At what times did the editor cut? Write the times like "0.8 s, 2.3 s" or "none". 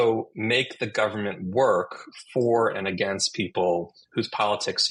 none